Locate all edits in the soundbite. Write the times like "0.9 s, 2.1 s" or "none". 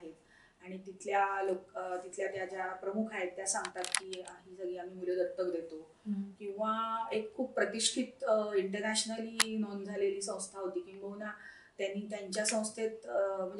none